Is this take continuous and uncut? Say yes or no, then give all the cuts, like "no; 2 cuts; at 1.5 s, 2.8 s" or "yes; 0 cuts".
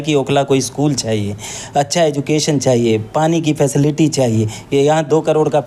yes; 0 cuts